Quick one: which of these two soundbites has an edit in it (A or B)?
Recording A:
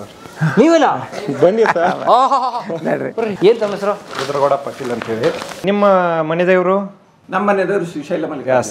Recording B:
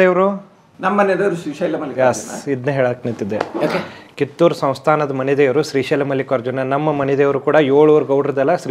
A